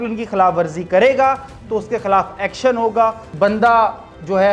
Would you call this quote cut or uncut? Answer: cut